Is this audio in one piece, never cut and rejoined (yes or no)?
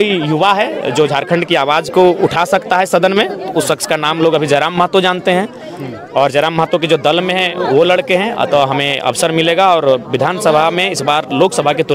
yes